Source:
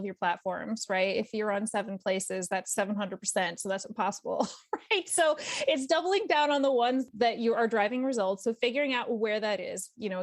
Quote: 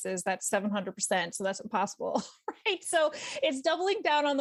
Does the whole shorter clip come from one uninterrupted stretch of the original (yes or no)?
yes